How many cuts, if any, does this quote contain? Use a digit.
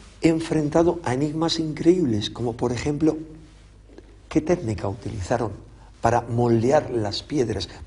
1